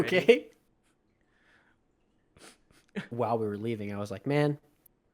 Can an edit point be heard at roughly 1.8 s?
no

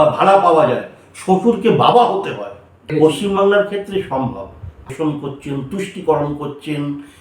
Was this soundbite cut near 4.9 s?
yes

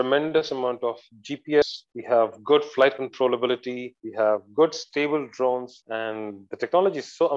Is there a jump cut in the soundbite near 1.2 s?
no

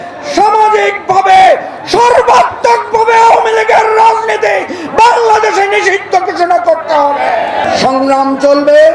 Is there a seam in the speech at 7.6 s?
yes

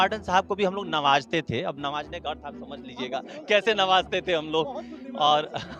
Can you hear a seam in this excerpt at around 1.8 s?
no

